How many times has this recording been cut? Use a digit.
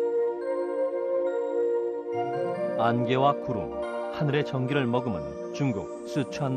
1